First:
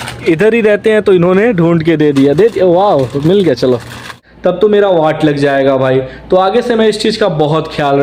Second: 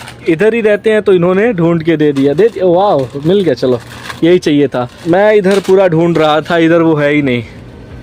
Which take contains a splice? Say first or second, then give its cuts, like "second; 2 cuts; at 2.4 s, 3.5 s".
first; 1 cut; at 4.1 s